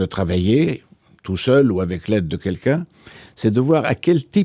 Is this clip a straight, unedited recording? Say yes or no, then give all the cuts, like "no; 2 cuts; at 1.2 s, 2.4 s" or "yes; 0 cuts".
yes; 0 cuts